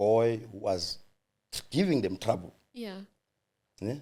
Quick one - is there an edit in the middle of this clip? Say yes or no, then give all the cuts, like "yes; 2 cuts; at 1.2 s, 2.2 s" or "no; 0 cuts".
no; 0 cuts